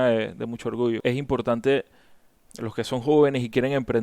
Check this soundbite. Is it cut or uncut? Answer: cut